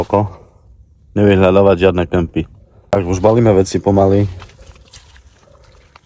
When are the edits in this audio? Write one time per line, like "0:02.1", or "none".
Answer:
0:02.9